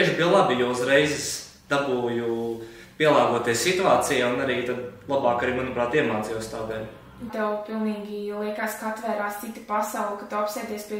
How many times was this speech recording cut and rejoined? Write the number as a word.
one